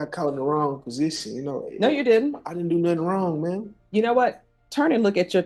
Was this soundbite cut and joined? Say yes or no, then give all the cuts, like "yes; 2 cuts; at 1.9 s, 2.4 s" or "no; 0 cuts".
no; 0 cuts